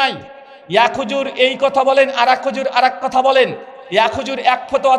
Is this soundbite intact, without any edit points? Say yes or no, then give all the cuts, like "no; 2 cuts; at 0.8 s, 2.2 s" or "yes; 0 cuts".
yes; 0 cuts